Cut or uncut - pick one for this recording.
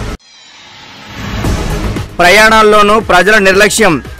cut